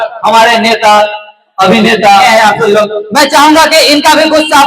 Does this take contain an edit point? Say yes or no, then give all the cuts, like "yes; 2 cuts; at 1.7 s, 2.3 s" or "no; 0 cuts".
yes; 1 cut; at 2.3 s